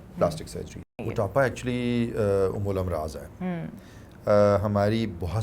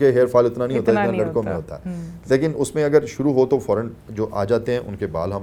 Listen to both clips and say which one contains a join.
first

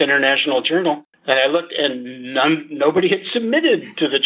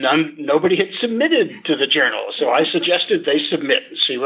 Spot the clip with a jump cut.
first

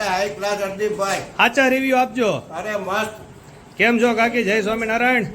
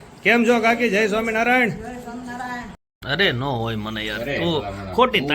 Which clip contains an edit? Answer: second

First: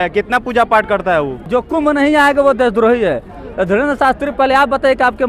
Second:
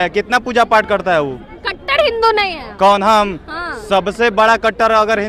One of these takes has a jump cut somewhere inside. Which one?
first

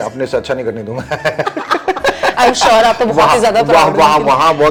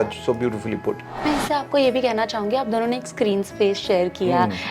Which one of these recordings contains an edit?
second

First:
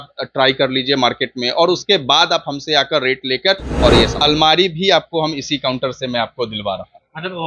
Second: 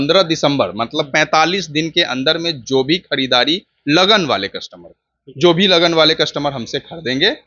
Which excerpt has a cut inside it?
first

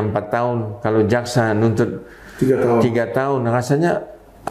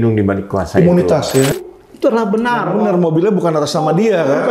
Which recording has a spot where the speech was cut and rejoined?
second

